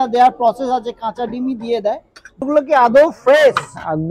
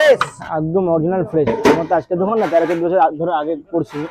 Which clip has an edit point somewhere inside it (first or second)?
first